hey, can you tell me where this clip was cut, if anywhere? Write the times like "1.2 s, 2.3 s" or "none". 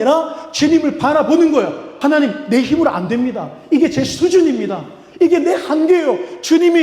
1.8 s